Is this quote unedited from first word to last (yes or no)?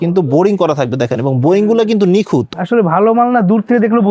no